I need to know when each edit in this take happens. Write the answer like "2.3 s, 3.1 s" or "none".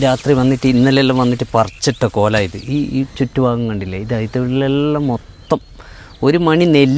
none